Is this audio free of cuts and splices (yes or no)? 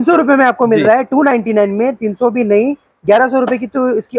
yes